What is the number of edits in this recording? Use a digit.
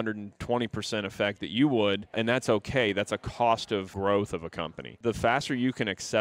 3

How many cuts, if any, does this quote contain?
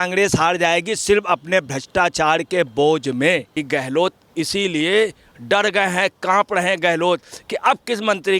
1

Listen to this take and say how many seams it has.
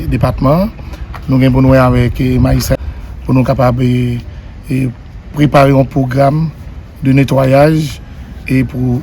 1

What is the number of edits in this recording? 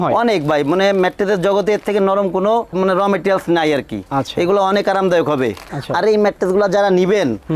0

